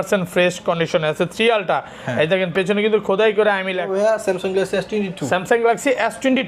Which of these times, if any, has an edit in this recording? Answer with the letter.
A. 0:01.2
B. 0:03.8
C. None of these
B